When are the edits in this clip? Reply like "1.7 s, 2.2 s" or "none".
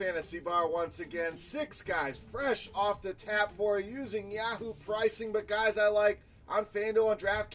none